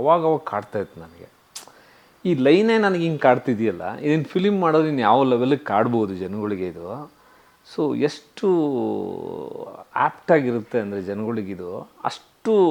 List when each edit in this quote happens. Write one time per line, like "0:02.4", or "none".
none